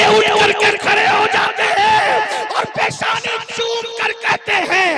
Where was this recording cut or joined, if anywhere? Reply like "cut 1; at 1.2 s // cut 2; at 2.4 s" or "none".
none